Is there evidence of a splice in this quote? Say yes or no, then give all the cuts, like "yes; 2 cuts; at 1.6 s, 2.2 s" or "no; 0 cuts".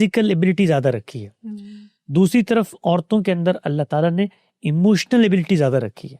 no; 0 cuts